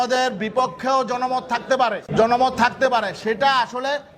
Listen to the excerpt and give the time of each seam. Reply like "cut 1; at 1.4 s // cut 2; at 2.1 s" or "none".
cut 1; at 2.1 s